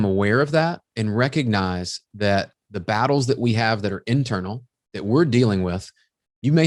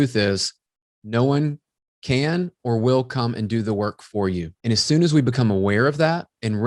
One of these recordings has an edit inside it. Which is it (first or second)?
second